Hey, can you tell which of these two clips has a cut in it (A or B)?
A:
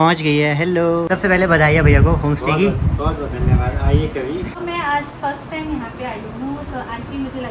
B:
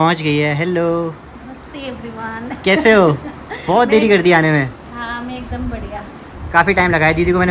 A